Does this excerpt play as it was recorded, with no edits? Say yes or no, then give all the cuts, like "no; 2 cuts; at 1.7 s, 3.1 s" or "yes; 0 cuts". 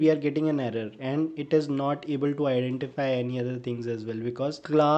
yes; 0 cuts